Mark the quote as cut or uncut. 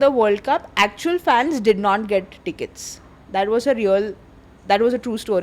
uncut